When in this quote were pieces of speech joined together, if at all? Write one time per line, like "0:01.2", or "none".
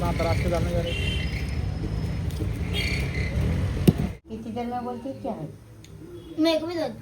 0:04.2